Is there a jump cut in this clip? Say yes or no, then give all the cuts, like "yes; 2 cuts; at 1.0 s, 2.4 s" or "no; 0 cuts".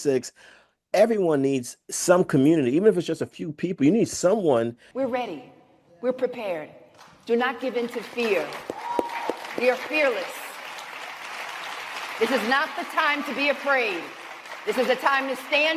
yes; 1 cut; at 4.9 s